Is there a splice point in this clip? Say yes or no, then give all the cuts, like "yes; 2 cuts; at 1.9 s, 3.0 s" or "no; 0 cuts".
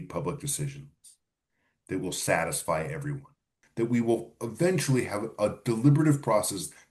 yes; 1 cut; at 3.6 s